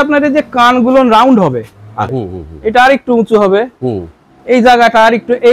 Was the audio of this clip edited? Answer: yes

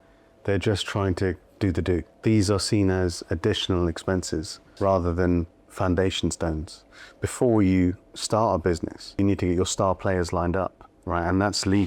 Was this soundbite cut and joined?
yes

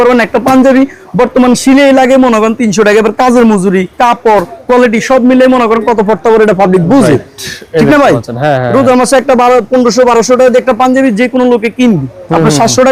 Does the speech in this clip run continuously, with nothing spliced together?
yes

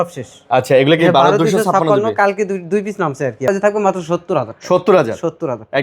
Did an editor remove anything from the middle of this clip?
yes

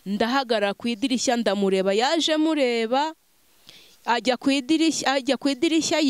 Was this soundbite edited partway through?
no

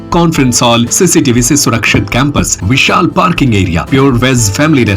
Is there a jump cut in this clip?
yes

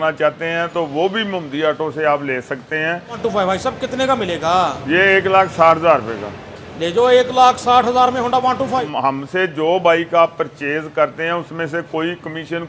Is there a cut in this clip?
yes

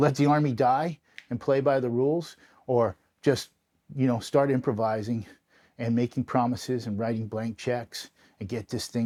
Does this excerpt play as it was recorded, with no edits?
yes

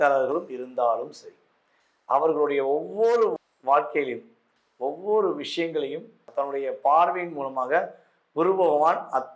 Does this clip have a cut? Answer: yes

